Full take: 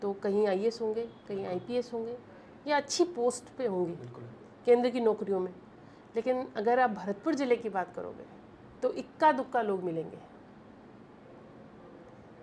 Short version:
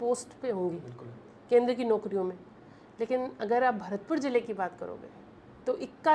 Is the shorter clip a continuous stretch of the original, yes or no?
yes